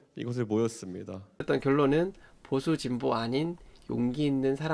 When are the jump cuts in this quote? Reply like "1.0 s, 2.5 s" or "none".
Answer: 1.3 s